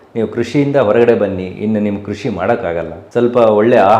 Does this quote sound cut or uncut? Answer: cut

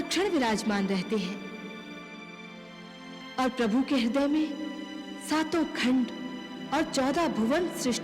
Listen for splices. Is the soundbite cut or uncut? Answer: cut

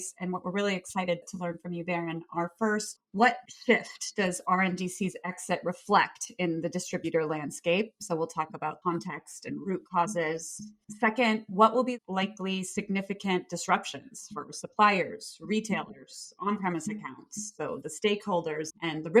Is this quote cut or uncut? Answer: uncut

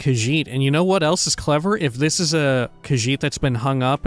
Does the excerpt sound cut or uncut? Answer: cut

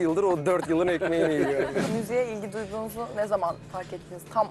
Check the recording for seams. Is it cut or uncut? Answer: cut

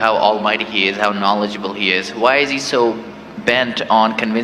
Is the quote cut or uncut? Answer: uncut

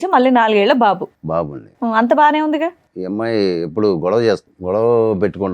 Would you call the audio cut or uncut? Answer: cut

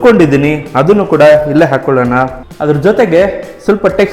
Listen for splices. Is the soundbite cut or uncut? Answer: cut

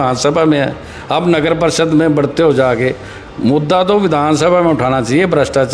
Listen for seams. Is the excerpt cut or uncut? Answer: uncut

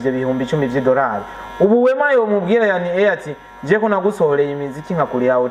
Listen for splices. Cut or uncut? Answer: uncut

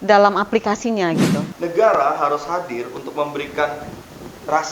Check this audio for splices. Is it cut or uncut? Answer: cut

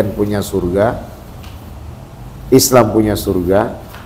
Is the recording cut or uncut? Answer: uncut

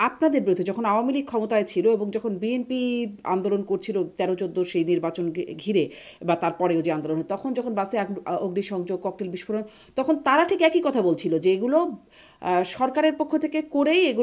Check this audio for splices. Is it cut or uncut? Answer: uncut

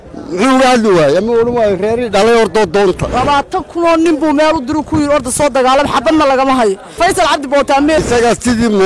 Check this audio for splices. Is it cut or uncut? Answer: cut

